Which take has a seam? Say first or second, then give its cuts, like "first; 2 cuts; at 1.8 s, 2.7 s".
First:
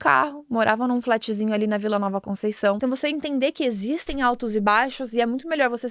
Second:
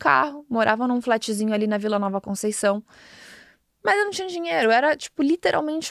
first; 1 cut; at 2.8 s